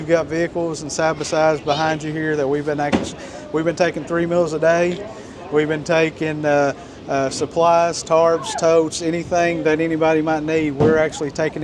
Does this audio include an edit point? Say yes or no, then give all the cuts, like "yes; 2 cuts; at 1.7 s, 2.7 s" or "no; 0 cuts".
no; 0 cuts